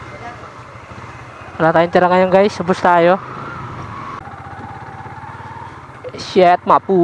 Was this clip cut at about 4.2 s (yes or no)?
yes